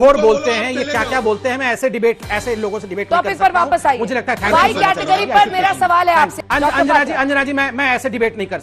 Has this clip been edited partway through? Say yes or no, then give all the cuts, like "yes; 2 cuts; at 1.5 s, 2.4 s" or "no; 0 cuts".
yes; 1 cut; at 6.4 s